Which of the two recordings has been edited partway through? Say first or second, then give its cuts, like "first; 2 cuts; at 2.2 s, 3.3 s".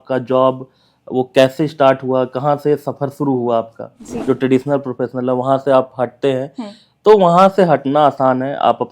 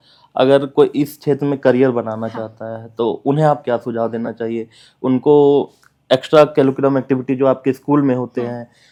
first; 1 cut; at 4.1 s